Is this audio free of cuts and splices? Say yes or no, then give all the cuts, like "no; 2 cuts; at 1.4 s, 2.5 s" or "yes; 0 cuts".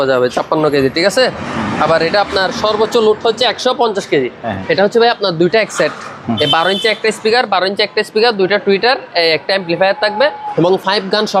no; 2 cuts; at 4.4 s, 10.4 s